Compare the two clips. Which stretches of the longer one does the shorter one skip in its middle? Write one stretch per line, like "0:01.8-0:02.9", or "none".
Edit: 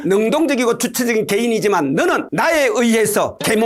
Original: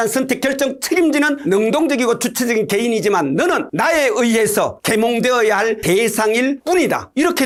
none